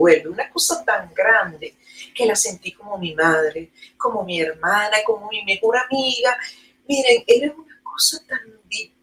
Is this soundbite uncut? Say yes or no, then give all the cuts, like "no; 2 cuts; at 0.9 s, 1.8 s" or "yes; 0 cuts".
yes; 0 cuts